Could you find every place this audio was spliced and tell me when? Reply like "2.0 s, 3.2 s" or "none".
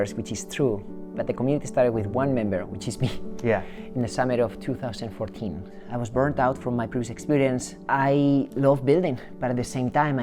5.7 s, 7.7 s